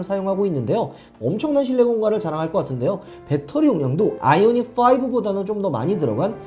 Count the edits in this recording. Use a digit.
1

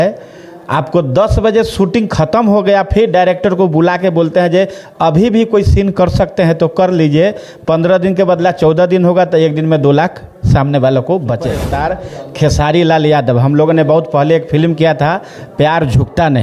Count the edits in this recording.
1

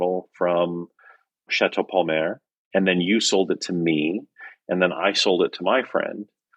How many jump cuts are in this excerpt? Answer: 2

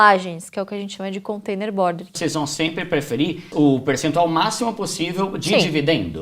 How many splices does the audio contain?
2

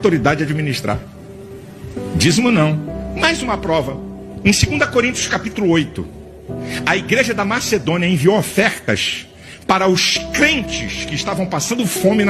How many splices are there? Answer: 1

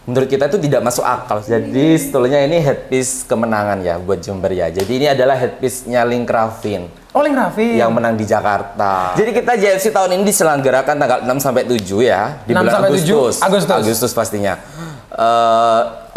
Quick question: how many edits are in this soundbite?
2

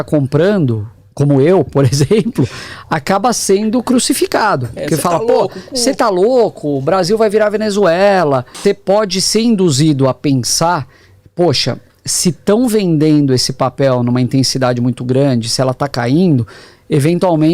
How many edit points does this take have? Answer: 1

